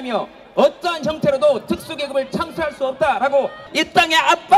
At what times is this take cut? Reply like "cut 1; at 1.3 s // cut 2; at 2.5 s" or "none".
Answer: cut 1; at 3.6 s